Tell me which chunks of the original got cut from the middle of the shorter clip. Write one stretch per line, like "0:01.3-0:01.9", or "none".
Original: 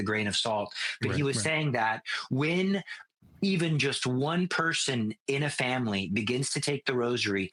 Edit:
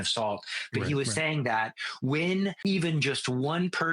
0:02.8-0:03.3